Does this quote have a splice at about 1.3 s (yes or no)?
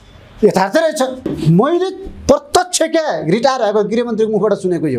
yes